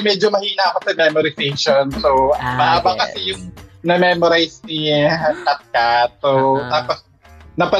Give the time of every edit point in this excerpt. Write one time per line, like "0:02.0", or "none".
none